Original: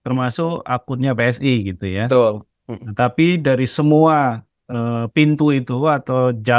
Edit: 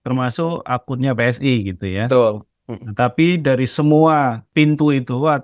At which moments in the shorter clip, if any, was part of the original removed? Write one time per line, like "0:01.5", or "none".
0:04.4